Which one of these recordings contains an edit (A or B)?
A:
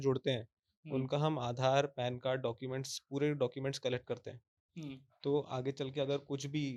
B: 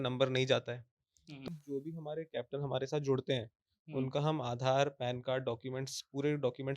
B